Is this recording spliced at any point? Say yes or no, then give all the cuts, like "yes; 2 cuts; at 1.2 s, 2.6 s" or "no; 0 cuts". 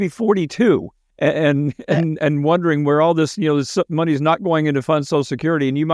no; 0 cuts